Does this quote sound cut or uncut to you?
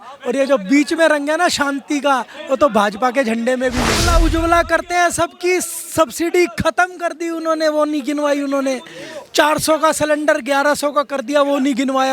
cut